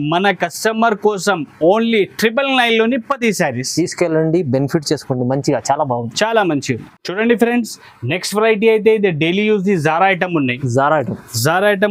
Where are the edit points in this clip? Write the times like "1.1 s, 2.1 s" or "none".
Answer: none